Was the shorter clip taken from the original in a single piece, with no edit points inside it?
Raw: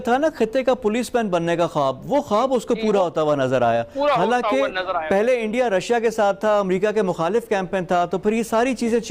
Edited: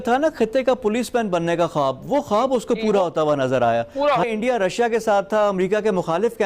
no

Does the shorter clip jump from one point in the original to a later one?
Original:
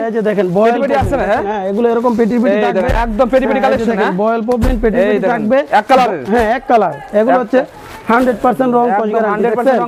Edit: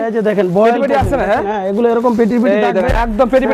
no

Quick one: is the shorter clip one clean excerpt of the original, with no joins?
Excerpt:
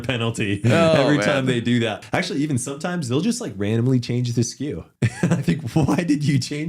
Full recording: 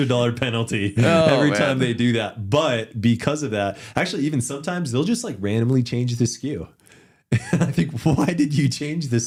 no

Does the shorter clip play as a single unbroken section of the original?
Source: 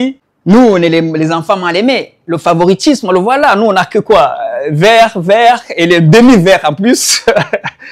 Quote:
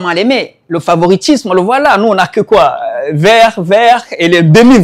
yes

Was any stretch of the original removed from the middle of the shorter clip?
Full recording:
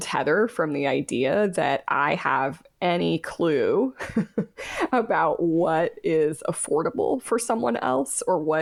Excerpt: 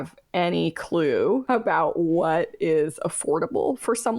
yes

